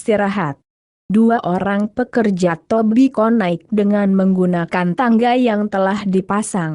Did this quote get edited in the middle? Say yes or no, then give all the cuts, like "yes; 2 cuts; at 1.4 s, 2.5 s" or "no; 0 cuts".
yes; 1 cut; at 1.2 s